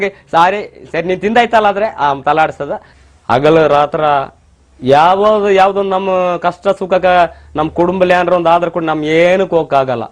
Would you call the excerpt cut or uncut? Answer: cut